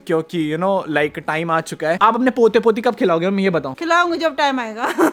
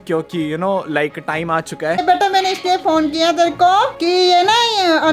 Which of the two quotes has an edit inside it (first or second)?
second